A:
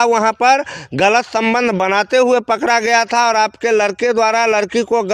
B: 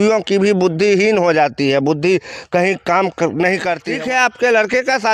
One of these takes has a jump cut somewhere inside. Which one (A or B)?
B